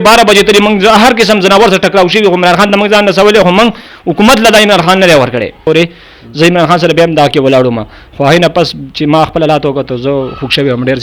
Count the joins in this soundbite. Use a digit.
1